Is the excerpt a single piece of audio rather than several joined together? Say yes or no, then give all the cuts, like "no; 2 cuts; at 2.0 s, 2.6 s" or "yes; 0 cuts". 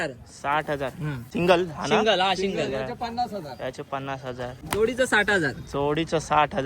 no; 2 cuts; at 1.2 s, 4.6 s